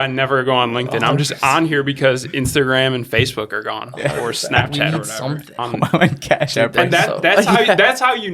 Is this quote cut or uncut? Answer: cut